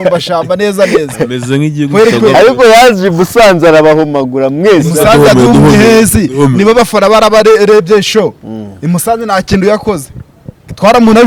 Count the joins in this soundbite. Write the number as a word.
zero